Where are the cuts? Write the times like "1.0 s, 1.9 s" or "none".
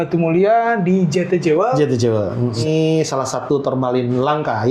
2.6 s